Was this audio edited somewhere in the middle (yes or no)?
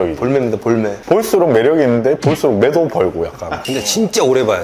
yes